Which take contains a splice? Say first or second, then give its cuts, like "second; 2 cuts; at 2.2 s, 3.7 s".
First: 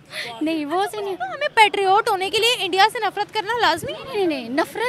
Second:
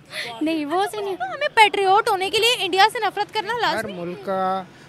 second; 1 cut; at 3.9 s